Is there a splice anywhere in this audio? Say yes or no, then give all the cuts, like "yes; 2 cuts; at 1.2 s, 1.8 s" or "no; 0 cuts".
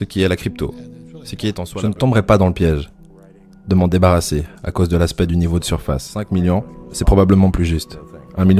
yes; 2 cuts; at 1.6 s, 6.3 s